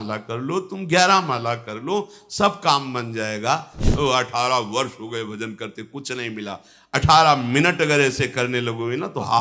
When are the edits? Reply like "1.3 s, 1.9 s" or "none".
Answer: 3.8 s